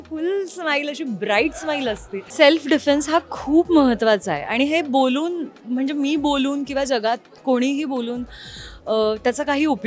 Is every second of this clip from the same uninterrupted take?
no; 1 cut; at 2.3 s

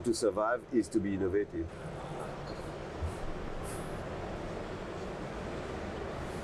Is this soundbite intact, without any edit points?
no; 1 cut; at 1.7 s

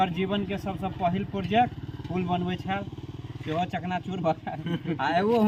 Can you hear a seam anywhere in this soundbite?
no; 0 cuts

